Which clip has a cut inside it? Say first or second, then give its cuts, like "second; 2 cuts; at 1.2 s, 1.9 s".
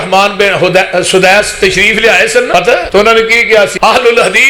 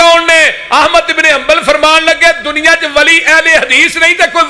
first; 2 cuts; at 2.8 s, 3.7 s